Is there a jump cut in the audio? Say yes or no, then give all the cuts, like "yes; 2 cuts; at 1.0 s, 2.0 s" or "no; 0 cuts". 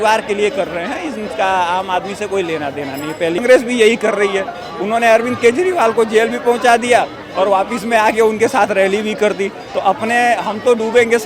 yes; 1 cut; at 3.4 s